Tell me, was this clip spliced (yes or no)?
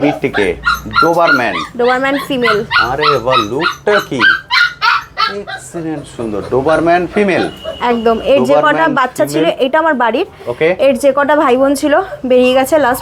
no